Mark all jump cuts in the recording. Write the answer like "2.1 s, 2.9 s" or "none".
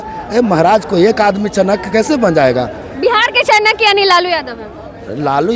none